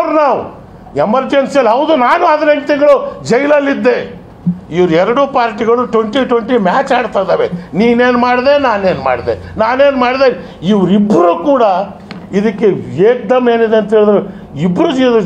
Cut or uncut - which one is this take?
uncut